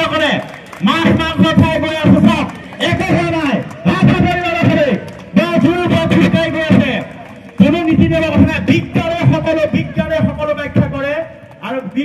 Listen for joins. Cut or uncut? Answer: uncut